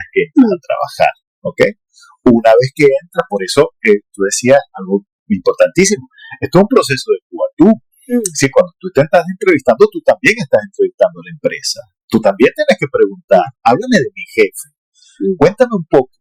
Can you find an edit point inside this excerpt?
no; 0 cuts

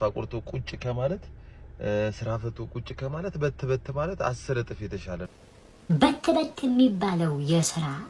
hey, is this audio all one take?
no; 1 cut; at 5.3 s

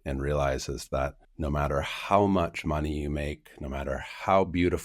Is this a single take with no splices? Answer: no; 1 cut; at 1.3 s

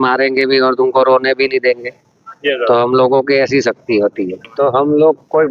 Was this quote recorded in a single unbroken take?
no; 1 cut; at 4.4 s

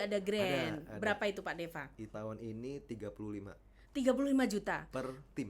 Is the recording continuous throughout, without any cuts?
no; 1 cut; at 2.1 s

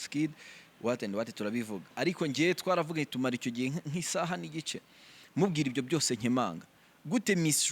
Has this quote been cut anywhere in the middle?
yes; 1 cut; at 1.9 s

